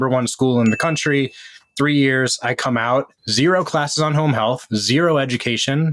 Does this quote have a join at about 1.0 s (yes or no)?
no